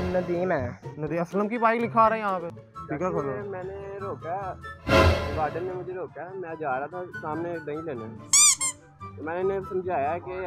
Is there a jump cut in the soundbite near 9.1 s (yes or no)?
no